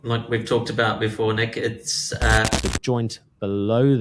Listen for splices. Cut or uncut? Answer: cut